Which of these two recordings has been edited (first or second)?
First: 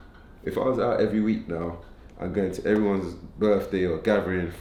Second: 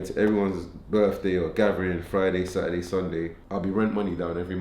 second